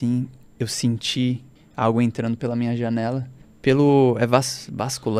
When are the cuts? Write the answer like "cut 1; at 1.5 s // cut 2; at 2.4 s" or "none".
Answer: none